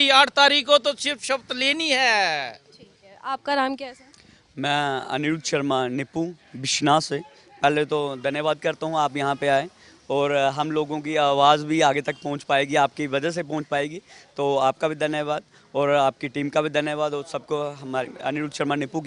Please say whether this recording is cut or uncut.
uncut